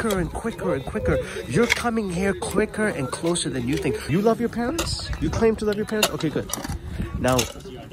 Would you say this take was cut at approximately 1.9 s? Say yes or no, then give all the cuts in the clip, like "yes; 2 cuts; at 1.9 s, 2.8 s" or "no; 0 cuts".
no; 1 cut; at 4.1 s